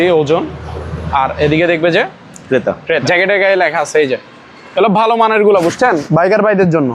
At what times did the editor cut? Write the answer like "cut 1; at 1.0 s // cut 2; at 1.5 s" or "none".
cut 1; at 3.0 s